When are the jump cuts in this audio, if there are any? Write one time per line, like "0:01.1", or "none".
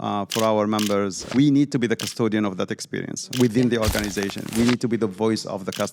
0:01.2
0:03.2